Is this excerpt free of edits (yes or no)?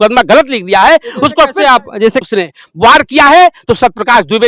no